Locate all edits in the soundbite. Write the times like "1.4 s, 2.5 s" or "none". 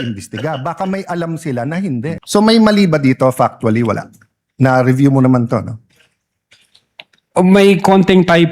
2.1 s